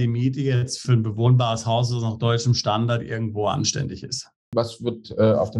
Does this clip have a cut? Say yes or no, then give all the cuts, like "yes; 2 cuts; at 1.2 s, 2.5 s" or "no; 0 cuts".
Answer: yes; 2 cuts; at 0.8 s, 4.4 s